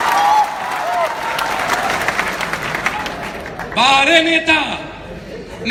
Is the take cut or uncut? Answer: uncut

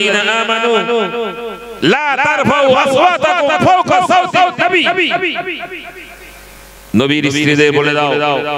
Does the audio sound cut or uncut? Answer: uncut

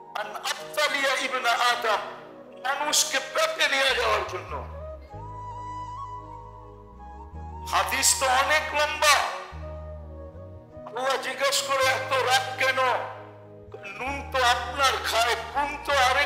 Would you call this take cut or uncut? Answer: cut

